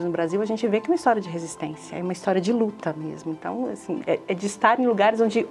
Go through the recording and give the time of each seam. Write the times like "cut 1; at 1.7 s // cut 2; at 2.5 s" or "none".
none